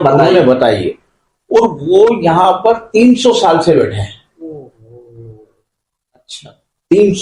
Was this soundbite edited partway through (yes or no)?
no